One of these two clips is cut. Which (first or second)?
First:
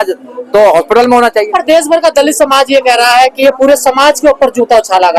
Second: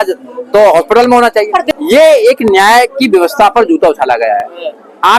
second